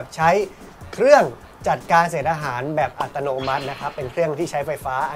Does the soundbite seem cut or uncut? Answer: uncut